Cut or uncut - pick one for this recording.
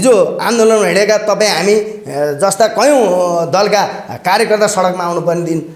uncut